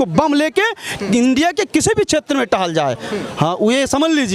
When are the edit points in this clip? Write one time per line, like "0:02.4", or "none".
none